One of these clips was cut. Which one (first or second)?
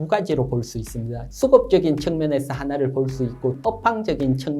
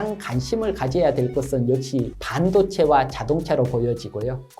first